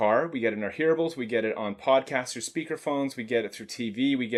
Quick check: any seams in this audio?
no; 0 cuts

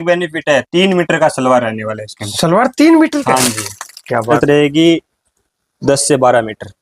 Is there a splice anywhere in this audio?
yes; 1 cut; at 4.3 s

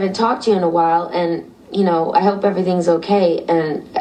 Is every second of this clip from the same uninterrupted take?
yes; 0 cuts

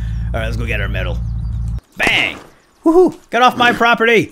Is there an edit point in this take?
yes; 1 cut; at 1.8 s

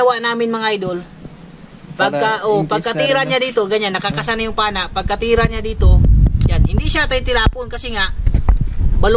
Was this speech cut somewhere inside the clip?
no; 0 cuts

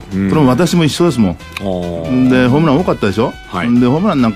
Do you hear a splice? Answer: yes; 1 cut; at 2.0 s

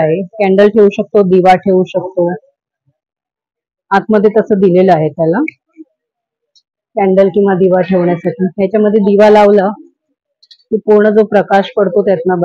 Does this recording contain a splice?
no; 0 cuts

